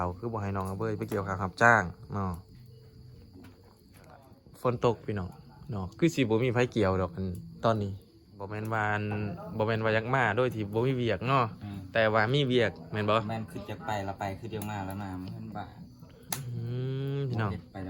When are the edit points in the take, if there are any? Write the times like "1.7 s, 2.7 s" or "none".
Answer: 4.4 s, 8.5 s